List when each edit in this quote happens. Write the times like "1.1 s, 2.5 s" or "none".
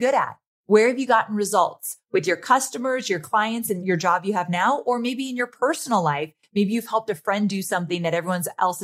3.8 s